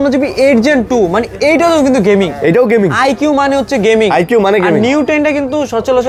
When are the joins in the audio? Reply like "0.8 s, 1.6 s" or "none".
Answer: none